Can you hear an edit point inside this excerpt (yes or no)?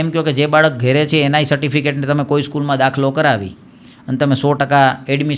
no